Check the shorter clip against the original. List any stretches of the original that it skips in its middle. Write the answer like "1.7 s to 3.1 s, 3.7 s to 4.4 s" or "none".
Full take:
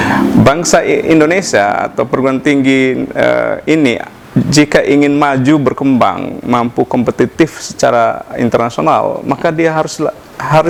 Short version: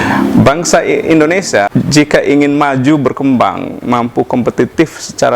1.7 s to 4.3 s